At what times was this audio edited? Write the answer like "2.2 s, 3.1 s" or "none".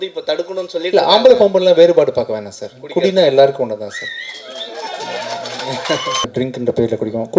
6.3 s